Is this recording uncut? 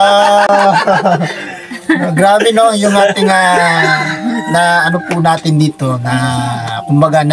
yes; 0 cuts

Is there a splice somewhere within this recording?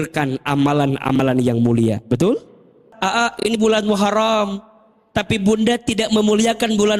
yes; 1 cut; at 2.9 s

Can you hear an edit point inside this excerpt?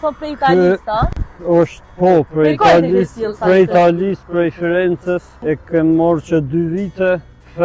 yes; 1 cut; at 5.3 s

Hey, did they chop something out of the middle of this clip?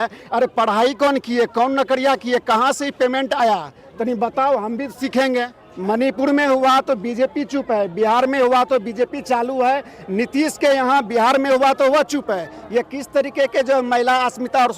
yes; 1 cut; at 5.6 s

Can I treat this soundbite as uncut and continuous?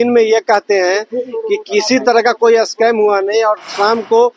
yes; 0 cuts

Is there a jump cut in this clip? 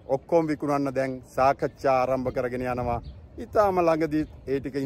no; 0 cuts

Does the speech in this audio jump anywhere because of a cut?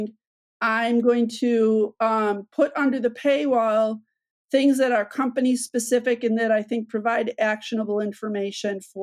no; 0 cuts

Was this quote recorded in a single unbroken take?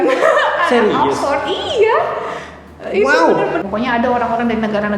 no; 1 cut; at 3.6 s

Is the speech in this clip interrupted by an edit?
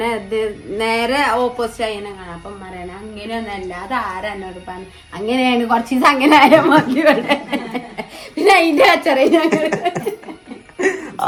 no; 0 cuts

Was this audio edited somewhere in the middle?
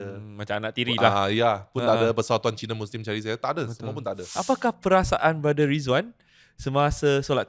yes; 1 cut; at 4.4 s

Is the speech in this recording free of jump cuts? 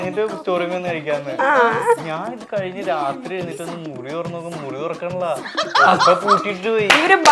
yes; 0 cuts

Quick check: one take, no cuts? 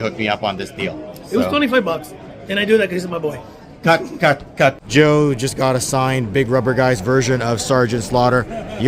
no; 1 cut; at 4.8 s

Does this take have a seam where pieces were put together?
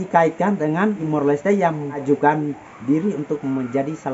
yes; 2 cuts; at 1.0 s, 2.0 s

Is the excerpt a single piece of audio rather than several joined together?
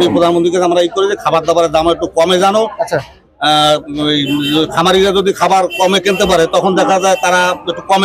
yes; 0 cuts

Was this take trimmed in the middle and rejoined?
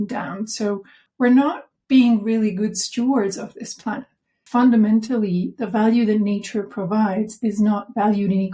yes; 2 cuts; at 1.0 s, 4.3 s

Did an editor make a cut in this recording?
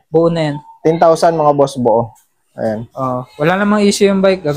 no; 0 cuts

